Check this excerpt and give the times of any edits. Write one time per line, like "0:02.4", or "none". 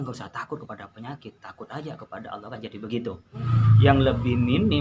0:03.6